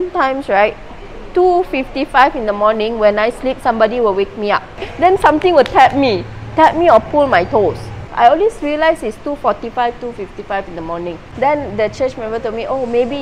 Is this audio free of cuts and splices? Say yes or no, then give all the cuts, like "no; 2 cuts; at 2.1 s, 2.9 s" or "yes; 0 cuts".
no; 3 cuts; at 4.9 s, 8.1 s, 11.2 s